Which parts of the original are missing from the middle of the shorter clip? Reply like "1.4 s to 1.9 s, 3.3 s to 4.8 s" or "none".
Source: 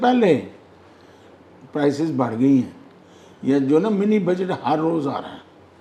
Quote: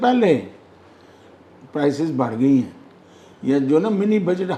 none